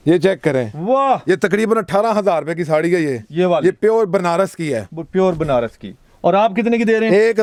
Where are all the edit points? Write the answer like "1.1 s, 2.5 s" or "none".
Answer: none